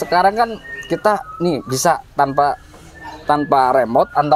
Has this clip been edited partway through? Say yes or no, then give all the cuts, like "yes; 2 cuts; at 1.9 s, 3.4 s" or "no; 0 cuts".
no; 0 cuts